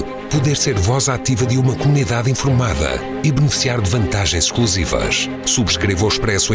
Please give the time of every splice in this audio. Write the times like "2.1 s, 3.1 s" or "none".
none

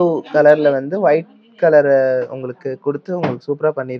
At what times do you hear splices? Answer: none

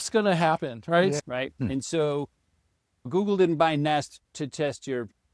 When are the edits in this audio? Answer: 1.2 s, 3.1 s, 4.2 s

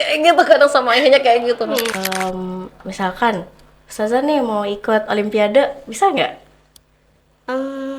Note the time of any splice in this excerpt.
1.9 s

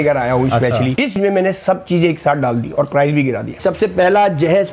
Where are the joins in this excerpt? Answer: 1.2 s, 3.6 s

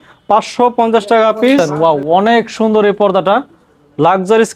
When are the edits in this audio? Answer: 1.7 s

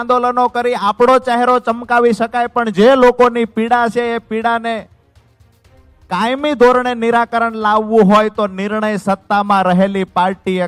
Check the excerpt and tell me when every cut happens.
none

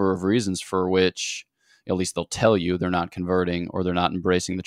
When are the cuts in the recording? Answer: none

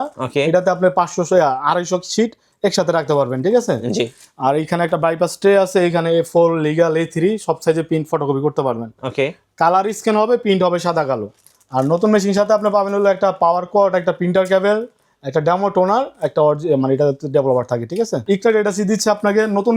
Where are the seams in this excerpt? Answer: 18.2 s

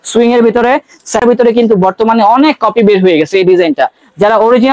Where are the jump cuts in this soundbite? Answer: 1.2 s

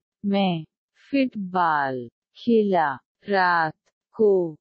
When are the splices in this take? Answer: none

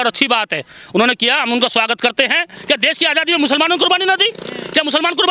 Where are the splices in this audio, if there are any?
2.5 s

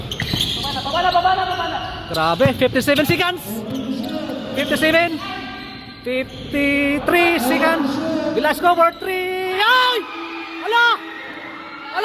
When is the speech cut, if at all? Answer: none

